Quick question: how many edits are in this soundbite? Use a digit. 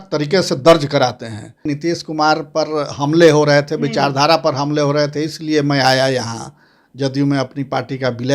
1